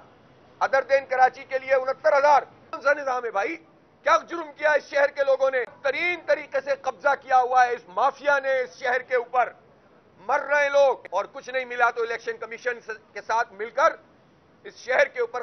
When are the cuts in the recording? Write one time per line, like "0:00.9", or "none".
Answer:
0:02.8
0:05.8
0:11.0